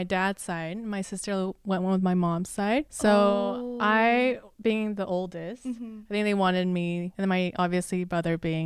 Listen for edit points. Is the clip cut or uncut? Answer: cut